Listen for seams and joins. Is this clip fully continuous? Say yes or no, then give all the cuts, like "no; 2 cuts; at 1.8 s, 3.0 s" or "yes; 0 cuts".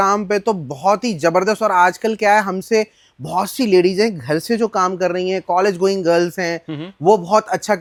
yes; 0 cuts